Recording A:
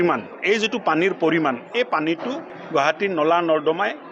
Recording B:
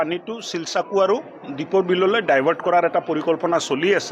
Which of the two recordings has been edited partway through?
A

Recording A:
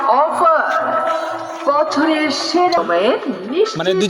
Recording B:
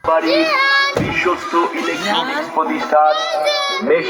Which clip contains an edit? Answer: A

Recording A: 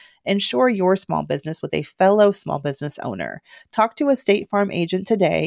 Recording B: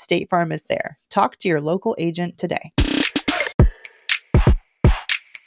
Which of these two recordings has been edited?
B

